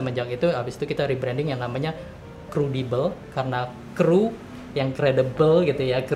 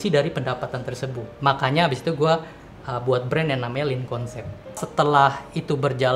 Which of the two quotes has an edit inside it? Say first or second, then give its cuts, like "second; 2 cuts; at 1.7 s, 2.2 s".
second; 2 cuts; at 1.3 s, 4.8 s